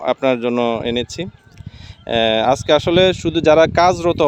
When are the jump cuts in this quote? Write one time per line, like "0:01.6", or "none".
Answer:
none